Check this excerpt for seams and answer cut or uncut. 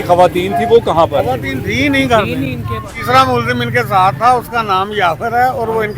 cut